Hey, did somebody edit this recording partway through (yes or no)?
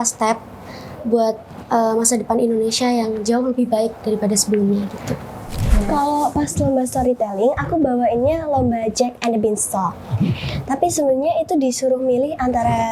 yes